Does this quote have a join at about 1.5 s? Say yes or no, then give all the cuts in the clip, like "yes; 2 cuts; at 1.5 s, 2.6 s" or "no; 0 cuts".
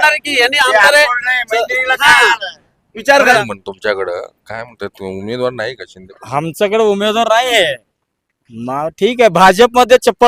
no; 1 cut; at 3.4 s